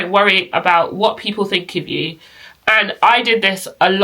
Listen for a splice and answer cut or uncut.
uncut